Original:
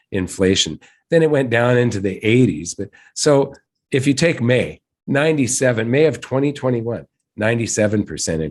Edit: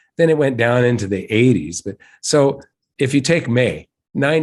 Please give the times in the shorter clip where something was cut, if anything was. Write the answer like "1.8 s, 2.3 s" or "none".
none

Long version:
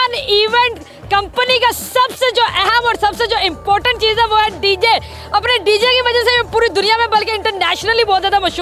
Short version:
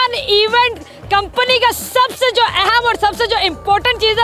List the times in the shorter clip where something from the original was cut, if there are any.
none

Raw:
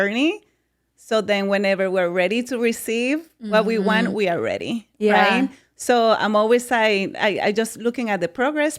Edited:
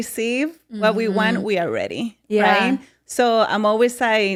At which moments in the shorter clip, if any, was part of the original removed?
none

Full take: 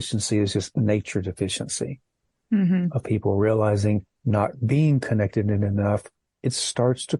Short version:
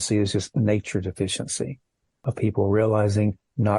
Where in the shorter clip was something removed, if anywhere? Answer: 2.2 s

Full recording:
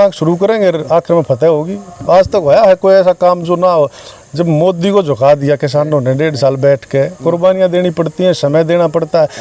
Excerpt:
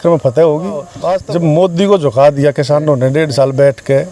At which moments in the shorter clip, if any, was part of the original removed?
0.9 s

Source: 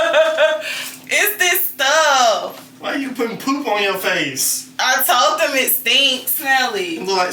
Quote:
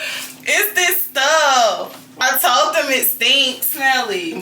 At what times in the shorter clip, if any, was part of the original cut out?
2.0 s

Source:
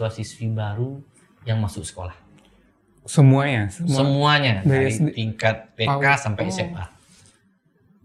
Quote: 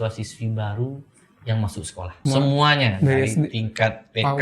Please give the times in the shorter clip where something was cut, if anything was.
2.2 s

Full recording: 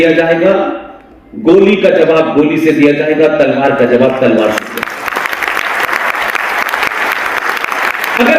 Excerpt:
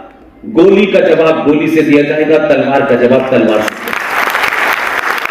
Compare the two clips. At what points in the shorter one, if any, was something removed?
4.0 s

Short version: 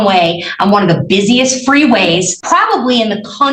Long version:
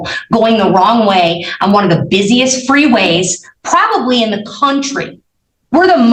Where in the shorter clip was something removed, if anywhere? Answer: 2.4 s

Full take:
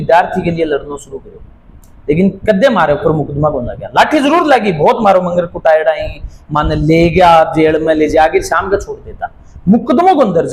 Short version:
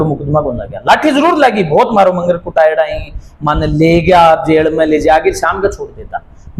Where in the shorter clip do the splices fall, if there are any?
none

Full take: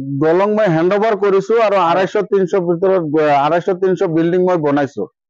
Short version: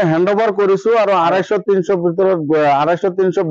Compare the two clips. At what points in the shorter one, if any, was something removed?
none

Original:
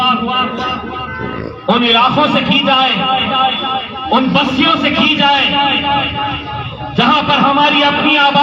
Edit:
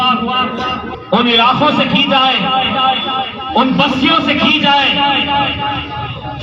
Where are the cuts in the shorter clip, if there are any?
0.9 s

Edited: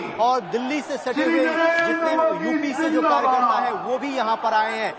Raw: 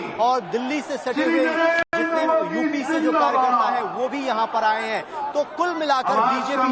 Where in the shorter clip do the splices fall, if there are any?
1.8 s

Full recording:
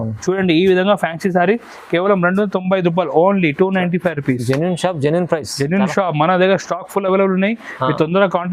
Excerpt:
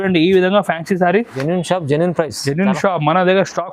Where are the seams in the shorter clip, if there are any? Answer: 1.4 s

